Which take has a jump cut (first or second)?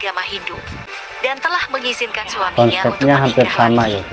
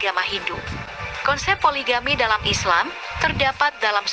first